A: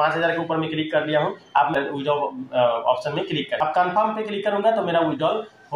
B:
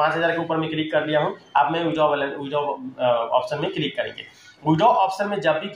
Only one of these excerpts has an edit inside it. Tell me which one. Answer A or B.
A